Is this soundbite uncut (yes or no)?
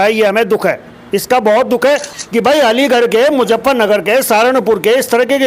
no